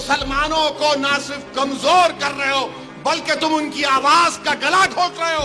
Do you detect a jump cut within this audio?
no; 0 cuts

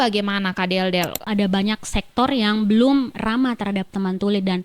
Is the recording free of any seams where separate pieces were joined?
no; 1 cut; at 1.2 s

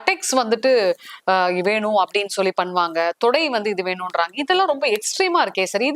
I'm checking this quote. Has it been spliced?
no; 0 cuts

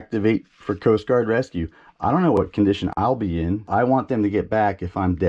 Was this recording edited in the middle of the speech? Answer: yes; 2 cuts; at 2.4 s, 3.6 s

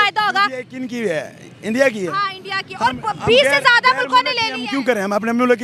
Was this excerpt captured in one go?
yes; 0 cuts

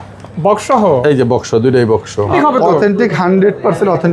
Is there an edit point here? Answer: yes; 1 cut; at 2.3 s

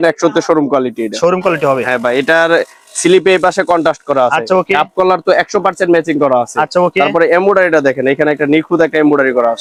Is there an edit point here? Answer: no; 0 cuts

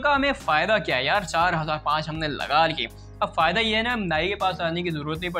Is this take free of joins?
yes; 0 cuts

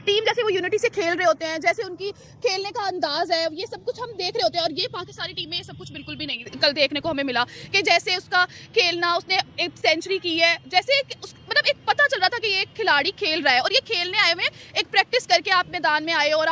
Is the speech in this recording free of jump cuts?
yes; 0 cuts

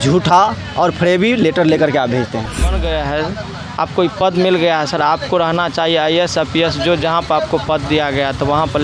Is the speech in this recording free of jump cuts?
no; 1 cut; at 2.7 s

